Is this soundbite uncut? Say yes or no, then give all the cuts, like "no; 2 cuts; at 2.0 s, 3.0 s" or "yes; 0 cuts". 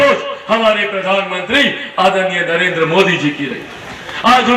yes; 0 cuts